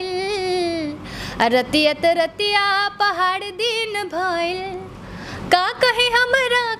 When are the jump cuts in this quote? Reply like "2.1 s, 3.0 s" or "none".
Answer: none